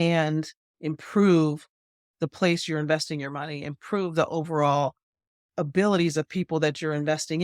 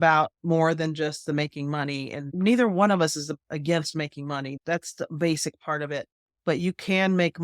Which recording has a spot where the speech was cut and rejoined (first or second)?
second